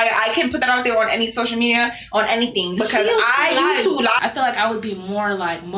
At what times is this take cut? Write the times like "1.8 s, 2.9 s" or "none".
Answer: 4.2 s